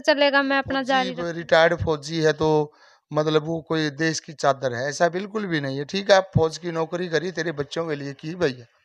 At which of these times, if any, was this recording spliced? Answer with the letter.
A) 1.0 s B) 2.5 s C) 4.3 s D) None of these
A